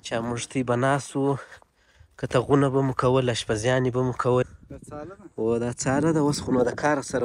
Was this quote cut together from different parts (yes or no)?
yes